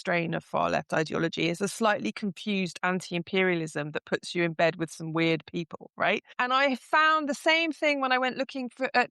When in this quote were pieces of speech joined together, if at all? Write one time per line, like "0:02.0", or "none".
0:06.3